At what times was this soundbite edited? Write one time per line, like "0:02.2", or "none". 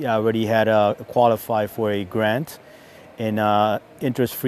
none